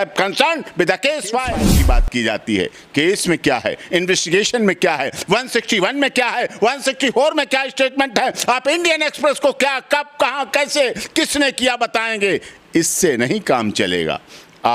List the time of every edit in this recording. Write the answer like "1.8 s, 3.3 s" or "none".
1.8 s